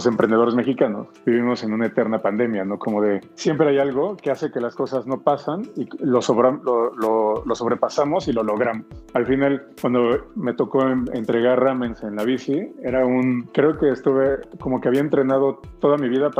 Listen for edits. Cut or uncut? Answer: uncut